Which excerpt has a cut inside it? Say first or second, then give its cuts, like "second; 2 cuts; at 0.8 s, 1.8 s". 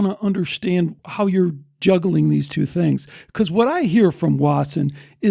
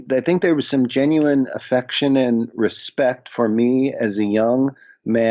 first; 1 cut; at 1.0 s